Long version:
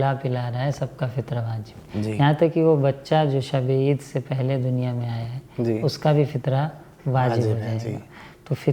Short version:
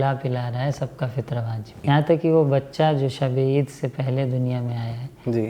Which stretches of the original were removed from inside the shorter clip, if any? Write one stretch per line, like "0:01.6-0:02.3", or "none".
0:01.8-0:02.1